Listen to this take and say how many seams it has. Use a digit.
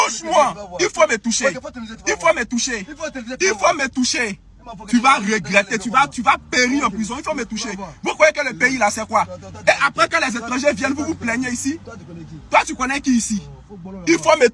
0